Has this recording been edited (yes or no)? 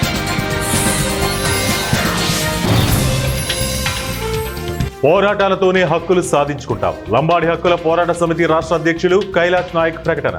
no